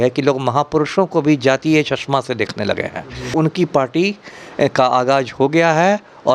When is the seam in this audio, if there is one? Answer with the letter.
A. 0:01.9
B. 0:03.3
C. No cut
B